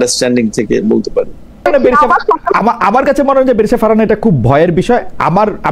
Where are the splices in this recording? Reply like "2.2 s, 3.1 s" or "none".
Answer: 1.7 s